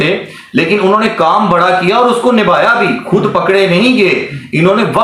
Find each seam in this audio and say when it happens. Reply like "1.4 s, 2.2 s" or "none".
none